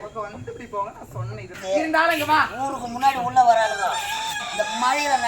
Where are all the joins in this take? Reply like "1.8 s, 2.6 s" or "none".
1.5 s